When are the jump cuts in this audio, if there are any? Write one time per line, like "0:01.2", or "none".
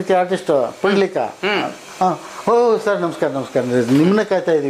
none